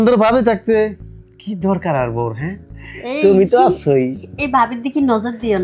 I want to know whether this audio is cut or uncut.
uncut